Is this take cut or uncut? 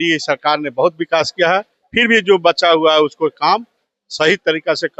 uncut